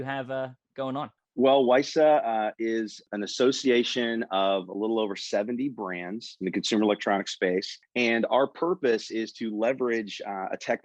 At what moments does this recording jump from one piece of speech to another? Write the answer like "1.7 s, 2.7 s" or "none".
1.2 s, 3.0 s, 7.8 s